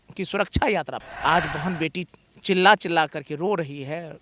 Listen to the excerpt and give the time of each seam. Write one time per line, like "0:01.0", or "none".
0:01.0